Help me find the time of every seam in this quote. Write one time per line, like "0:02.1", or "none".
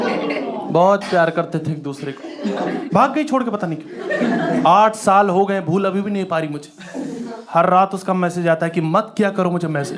0:02.8